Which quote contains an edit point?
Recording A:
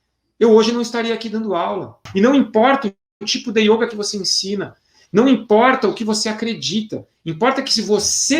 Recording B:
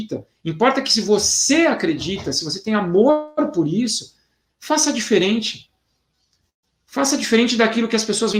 A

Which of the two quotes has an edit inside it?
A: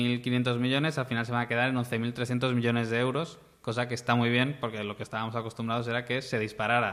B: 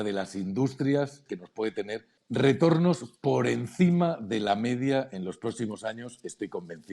B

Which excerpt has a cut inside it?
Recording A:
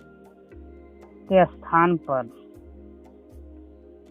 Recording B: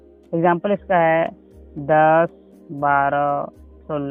A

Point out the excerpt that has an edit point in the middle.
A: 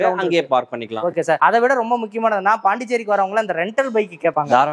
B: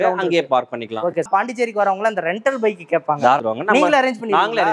B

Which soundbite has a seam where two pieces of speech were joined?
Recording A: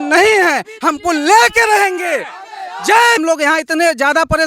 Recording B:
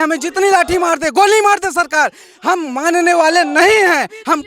A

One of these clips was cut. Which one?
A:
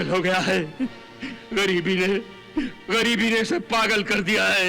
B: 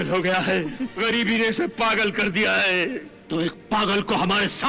B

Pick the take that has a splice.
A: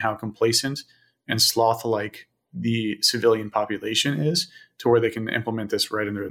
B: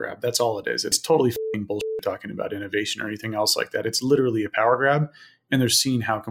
B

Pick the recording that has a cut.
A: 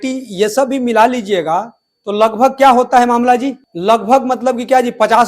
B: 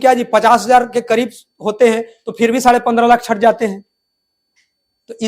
A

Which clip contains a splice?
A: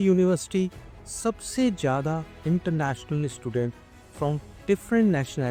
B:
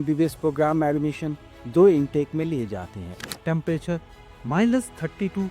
B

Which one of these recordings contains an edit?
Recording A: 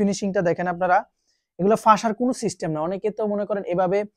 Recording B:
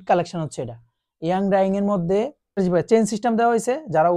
B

